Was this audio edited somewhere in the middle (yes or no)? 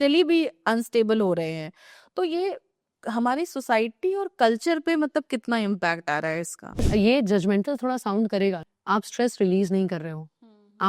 yes